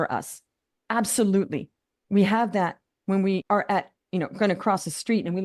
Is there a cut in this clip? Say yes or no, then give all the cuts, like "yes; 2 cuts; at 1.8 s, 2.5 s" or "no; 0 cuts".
yes; 1 cut; at 3.4 s